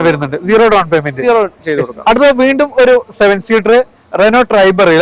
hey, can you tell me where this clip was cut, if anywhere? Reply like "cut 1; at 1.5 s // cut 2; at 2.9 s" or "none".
none